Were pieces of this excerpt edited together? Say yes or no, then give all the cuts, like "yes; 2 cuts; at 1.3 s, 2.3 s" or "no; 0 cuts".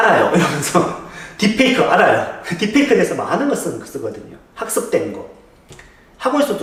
no; 0 cuts